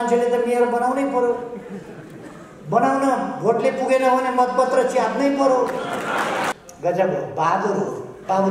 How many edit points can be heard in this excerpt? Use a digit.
1